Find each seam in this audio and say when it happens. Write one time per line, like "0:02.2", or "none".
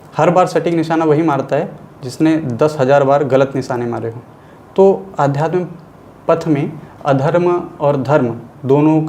0:06.8